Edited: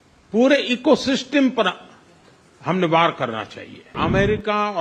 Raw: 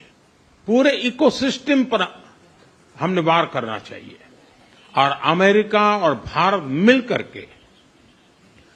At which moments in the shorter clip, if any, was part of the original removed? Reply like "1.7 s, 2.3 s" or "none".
3.9 s